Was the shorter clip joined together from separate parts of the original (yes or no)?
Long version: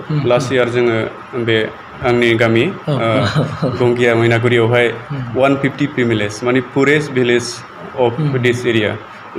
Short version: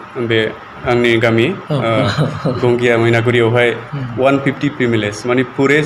no